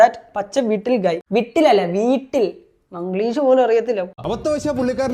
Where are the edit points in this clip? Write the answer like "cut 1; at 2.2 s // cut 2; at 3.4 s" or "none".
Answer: cut 1; at 1.2 s // cut 2; at 4.2 s